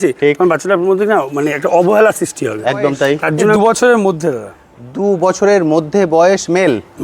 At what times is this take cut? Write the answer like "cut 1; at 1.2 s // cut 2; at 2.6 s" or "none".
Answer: cut 1; at 3.6 s